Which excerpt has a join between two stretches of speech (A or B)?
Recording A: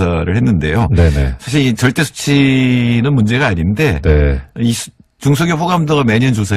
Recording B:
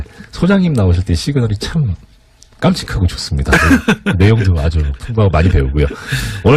B